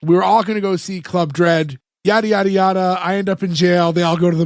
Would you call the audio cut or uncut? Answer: cut